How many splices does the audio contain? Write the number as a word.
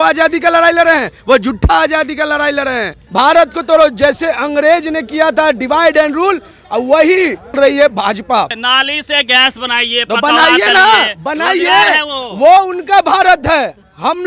three